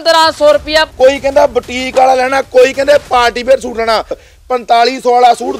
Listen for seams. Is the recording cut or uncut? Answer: cut